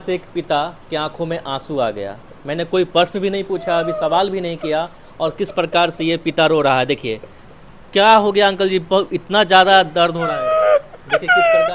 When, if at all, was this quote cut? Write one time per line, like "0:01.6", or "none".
none